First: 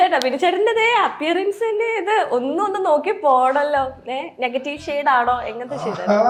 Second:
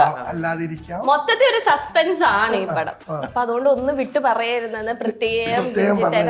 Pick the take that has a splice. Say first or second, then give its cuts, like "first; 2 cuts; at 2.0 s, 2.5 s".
second; 1 cut; at 3.2 s